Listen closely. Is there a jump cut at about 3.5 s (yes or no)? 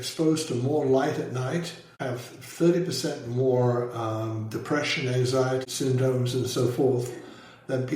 no